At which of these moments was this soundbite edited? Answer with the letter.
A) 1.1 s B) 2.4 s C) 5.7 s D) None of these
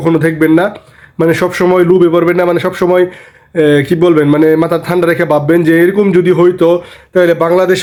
D